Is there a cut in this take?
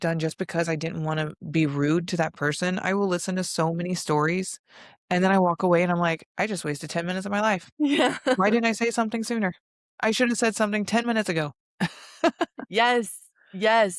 no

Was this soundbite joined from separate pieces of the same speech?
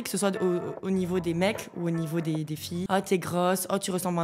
yes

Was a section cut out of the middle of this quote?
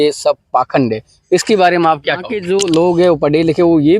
yes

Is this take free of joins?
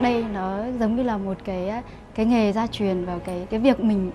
yes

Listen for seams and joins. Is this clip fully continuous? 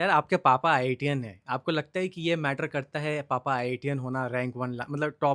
yes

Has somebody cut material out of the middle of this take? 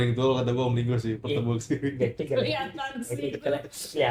no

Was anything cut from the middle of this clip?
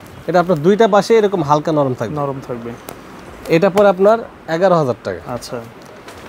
no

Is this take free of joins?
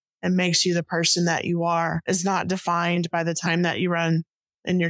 no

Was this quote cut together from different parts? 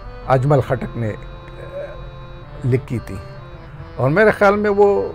no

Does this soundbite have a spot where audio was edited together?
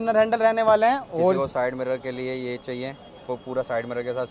no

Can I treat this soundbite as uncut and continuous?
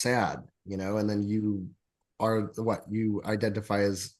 yes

